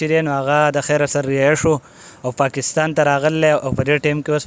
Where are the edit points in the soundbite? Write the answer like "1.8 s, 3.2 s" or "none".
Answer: none